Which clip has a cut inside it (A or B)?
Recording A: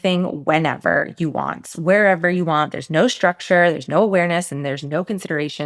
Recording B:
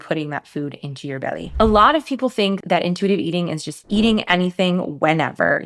B